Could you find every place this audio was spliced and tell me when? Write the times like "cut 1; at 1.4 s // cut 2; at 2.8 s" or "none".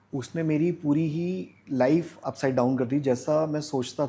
cut 1; at 2.1 s